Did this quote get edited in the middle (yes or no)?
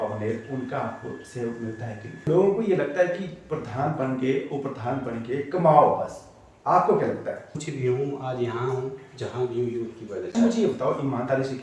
yes